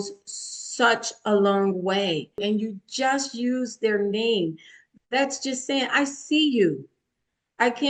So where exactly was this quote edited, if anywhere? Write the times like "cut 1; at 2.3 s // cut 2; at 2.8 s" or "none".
cut 1; at 2.4 s